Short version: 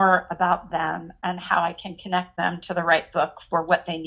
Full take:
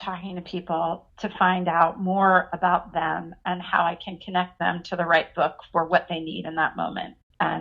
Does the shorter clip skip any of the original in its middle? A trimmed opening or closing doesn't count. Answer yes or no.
no